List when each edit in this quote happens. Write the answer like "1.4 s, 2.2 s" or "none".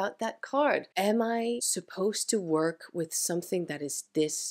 0.9 s, 1.8 s